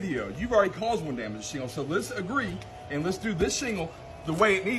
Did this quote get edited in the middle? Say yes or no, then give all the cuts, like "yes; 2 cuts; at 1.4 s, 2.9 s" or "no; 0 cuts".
no; 0 cuts